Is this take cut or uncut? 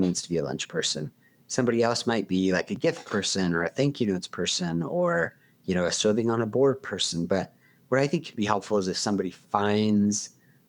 uncut